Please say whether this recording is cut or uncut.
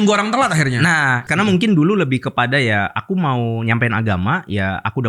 cut